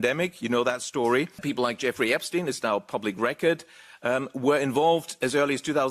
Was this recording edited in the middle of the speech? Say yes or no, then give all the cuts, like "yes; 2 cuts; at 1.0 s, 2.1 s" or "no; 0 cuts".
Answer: yes; 1 cut; at 1.4 s